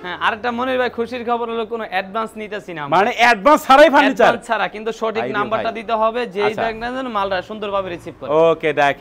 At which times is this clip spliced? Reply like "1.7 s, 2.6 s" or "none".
none